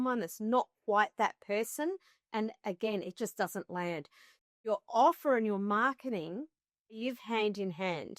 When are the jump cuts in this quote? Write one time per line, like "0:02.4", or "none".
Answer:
0:07.0